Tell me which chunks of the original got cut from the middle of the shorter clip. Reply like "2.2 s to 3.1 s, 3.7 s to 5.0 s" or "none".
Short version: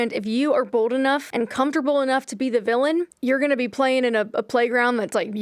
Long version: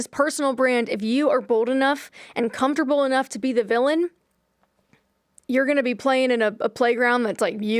2.0 s to 2.3 s, 4.2 s to 5.4 s

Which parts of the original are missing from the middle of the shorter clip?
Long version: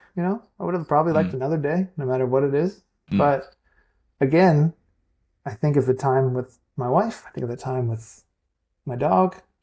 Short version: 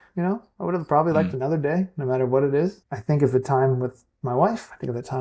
2.9 s to 5.4 s

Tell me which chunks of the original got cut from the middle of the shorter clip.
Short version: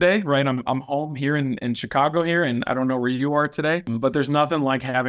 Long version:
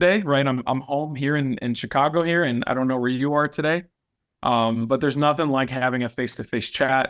3.9 s to 4.8 s

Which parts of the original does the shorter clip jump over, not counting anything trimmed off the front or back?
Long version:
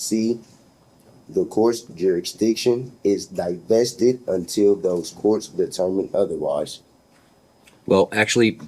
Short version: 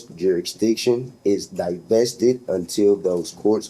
none

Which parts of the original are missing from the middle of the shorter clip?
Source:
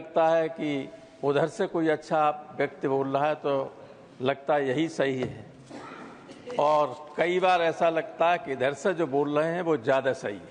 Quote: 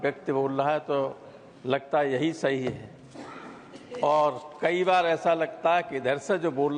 none

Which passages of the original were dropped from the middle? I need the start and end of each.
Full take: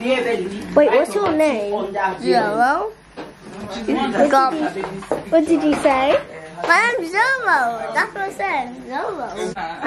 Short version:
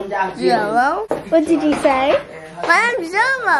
3.0 s to 5.1 s

